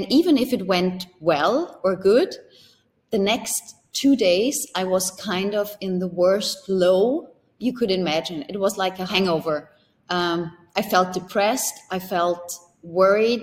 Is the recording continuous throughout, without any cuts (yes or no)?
no